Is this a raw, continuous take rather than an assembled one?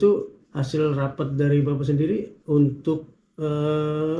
yes; 0 cuts

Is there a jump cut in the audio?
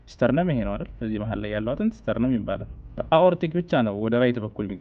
yes; 1 cut; at 3.0 s

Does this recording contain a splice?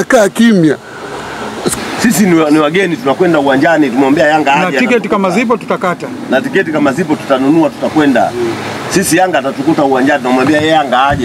yes; 1 cut; at 1.8 s

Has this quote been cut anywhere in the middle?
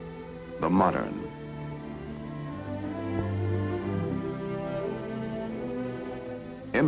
yes; 1 cut; at 3.9 s

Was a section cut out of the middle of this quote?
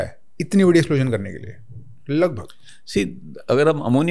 no; 0 cuts

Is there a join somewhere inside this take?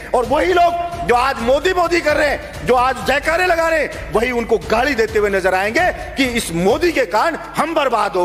no; 0 cuts

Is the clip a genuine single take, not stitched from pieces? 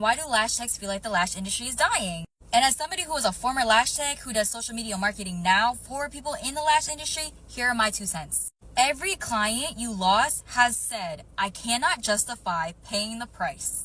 yes; 0 cuts

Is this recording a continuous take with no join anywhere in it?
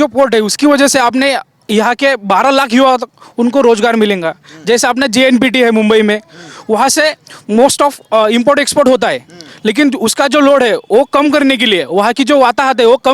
yes; 0 cuts

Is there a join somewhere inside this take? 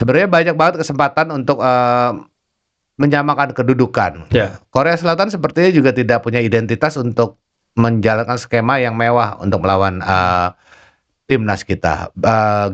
no; 0 cuts

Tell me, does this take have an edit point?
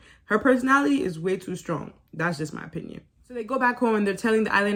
no; 0 cuts

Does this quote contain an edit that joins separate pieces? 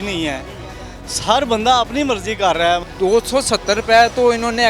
yes; 1 cut; at 2.9 s

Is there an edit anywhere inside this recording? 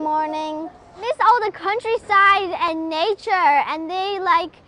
yes; 1 cut; at 1.0 s

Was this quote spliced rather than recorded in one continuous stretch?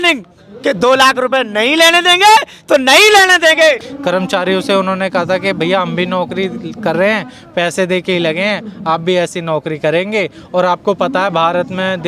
yes; 1 cut; at 3.9 s

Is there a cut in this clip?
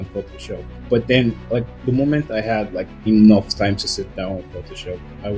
no; 0 cuts

